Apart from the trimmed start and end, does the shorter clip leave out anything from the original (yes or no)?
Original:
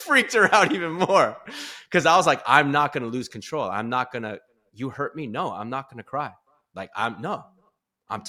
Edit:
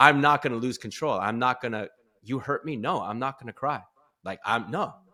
no